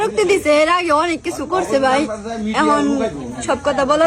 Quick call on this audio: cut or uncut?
uncut